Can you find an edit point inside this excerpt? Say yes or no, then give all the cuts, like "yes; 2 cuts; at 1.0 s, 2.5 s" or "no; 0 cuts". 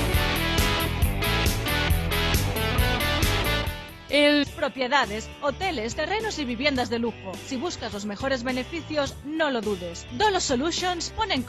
no; 0 cuts